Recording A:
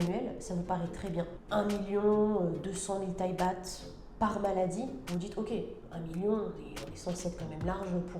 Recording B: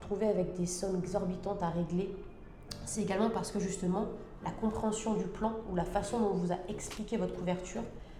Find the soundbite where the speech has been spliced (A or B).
A